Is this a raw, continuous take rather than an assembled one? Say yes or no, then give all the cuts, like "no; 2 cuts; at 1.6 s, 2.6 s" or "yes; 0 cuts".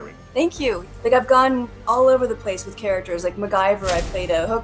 no; 2 cuts; at 0.8 s, 1.7 s